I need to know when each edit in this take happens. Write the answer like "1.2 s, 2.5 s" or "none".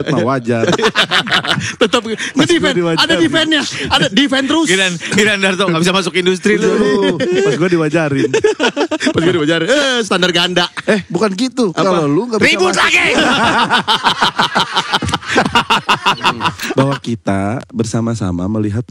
16.6 s